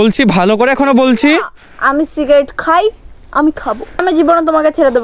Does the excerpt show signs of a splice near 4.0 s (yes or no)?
yes